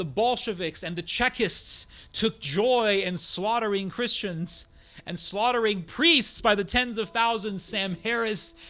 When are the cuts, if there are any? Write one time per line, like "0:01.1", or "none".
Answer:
none